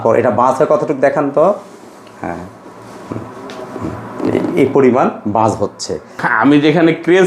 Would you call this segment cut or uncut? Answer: cut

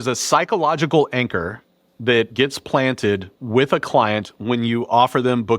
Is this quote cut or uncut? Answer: cut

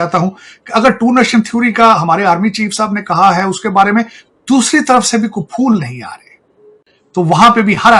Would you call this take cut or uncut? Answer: uncut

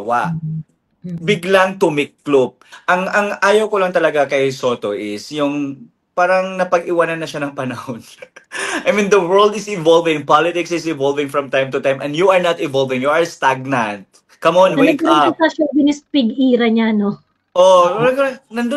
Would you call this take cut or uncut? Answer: cut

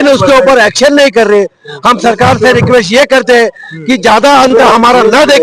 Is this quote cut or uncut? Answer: uncut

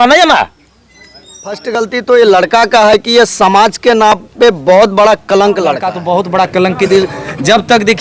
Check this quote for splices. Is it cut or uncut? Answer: cut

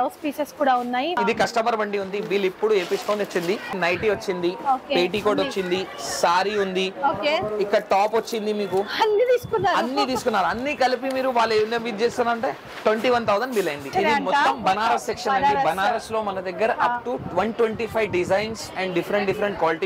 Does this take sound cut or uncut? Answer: cut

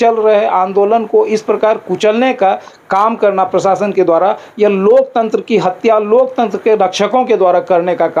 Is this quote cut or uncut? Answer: uncut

